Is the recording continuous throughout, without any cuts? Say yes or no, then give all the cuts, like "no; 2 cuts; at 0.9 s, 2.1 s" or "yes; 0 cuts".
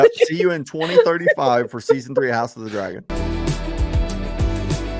no; 1 cut; at 3.0 s